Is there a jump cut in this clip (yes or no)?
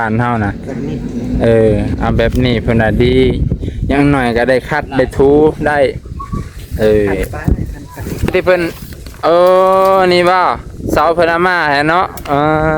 yes